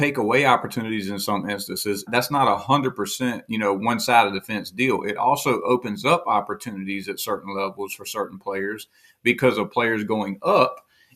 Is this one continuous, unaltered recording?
no; 1 cut; at 2.1 s

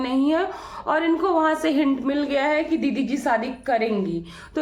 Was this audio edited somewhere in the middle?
no; 0 cuts

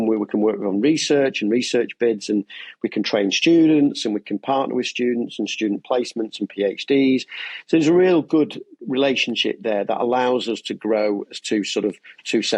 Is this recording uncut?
yes; 0 cuts

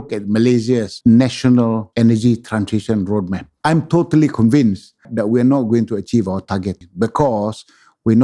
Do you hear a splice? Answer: yes; 5 cuts; at 0.9 s, 1.9 s, 3.4 s, 5.1 s, 6.8 s

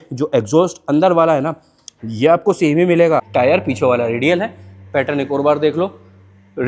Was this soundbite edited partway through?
yes; 1 cut; at 3.3 s

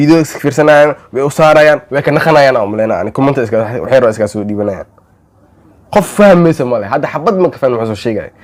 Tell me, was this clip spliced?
no; 0 cuts

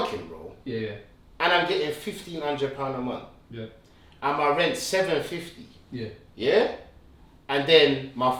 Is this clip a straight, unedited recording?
yes; 0 cuts

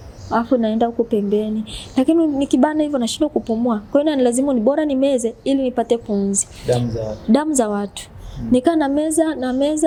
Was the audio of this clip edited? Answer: no; 0 cuts

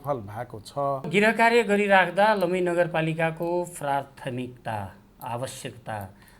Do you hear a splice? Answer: yes; 1 cut; at 1.1 s

